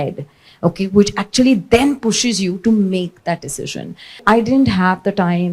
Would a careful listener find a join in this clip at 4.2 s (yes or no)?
yes